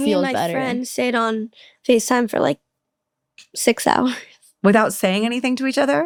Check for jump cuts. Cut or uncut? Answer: uncut